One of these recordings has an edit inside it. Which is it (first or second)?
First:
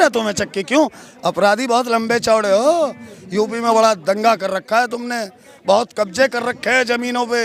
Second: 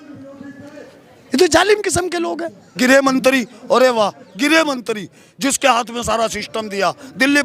second